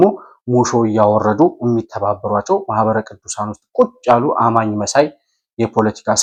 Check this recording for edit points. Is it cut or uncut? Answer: uncut